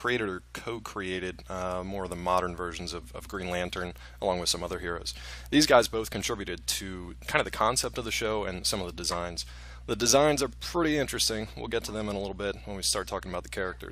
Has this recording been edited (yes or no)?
yes